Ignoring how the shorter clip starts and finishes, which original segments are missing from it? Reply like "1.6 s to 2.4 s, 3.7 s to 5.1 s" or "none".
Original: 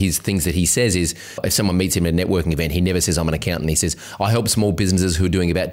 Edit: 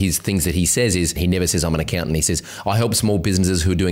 1.2 s to 2.7 s